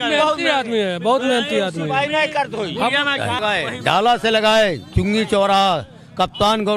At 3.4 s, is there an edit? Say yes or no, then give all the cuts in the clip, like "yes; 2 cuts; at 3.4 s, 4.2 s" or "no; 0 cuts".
yes; 1 cut; at 3.4 s